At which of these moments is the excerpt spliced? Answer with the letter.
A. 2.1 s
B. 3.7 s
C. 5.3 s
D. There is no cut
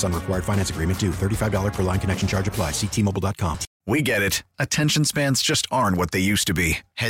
B